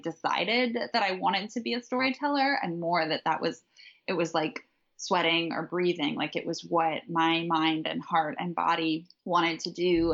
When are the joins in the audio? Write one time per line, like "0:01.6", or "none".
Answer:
0:09.1